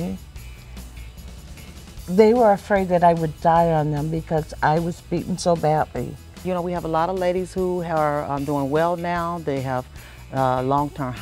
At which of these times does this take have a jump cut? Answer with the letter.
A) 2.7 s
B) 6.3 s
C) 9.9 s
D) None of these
B